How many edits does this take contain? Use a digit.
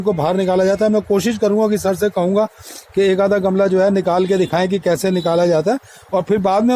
0